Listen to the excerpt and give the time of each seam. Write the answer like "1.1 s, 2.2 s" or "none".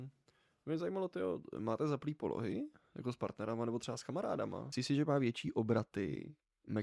4.6 s